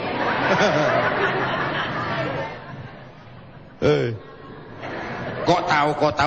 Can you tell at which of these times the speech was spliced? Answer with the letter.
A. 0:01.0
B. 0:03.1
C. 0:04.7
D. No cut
D